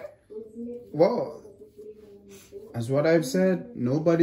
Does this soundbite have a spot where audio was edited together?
no; 0 cuts

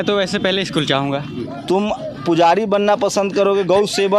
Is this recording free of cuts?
no; 1 cut; at 1.3 s

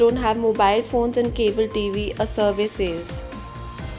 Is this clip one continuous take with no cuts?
no; 1 cut; at 3.0 s

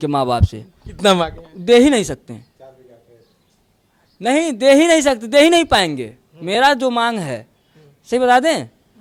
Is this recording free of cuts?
yes; 0 cuts

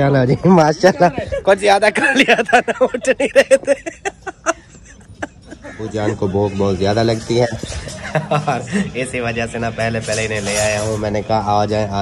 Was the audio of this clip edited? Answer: yes; 1 cut; at 5.8 s

